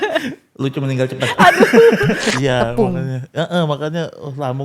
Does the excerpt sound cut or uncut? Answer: cut